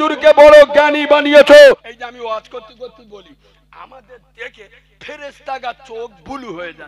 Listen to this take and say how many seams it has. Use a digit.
1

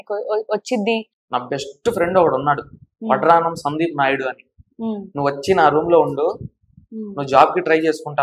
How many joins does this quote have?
1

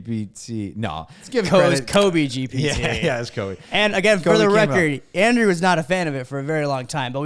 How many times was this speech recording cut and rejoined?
1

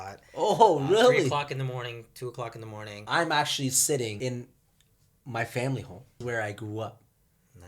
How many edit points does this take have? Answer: 3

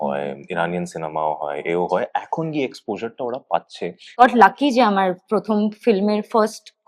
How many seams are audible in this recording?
1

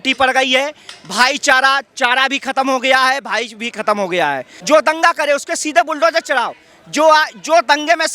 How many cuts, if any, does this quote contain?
1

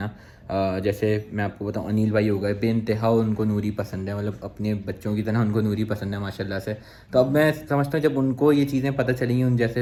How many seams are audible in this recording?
0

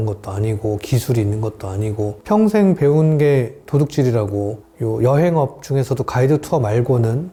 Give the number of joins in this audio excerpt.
0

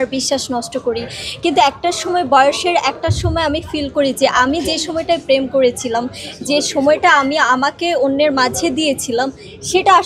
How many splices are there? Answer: 0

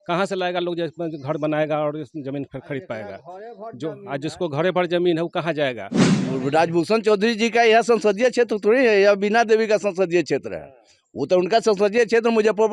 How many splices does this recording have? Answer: 1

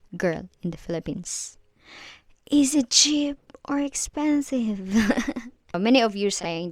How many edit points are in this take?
1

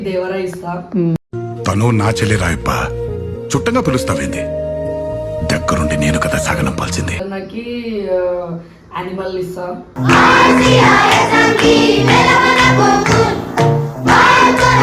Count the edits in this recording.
1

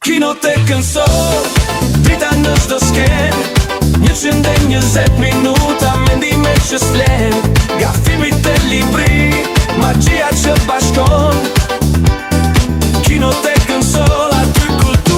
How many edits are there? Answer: 0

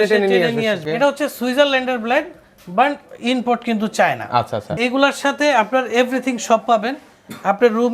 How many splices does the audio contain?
2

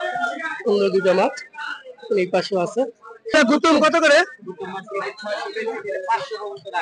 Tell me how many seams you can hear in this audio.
1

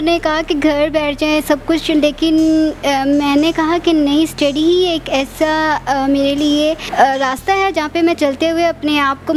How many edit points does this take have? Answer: 1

